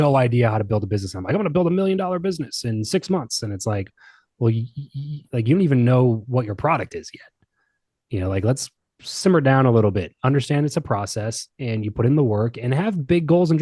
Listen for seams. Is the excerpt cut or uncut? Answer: uncut